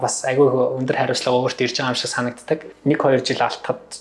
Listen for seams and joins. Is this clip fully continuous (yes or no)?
no